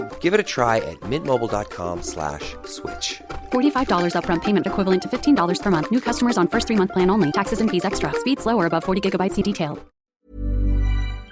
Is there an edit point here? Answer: yes; 1 cut; at 9.9 s

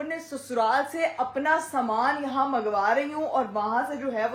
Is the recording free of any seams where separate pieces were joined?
yes; 0 cuts

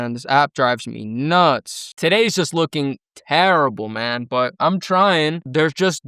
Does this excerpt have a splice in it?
yes; 1 cut; at 1.9 s

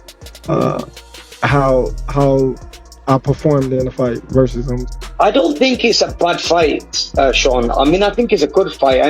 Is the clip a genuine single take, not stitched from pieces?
no; 1 cut; at 4.9 s

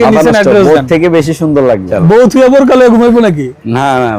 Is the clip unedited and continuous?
no; 1 cut; at 1.9 s

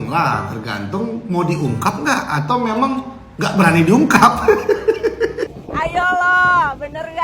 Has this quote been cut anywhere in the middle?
yes; 1 cut; at 5.5 s

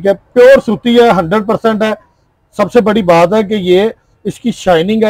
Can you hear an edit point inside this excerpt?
no; 0 cuts

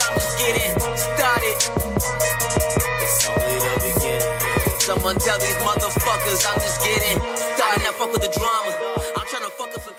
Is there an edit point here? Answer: no; 0 cuts

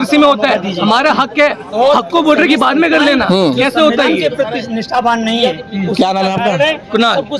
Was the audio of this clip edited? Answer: no; 0 cuts

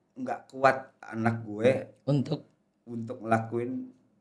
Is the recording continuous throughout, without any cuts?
yes; 0 cuts

